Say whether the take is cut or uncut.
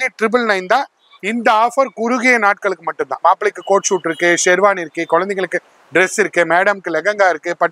cut